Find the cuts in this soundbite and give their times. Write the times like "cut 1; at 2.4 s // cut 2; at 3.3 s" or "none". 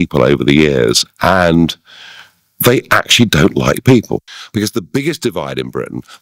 cut 1; at 4.2 s